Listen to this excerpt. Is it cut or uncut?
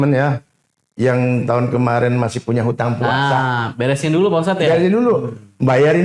uncut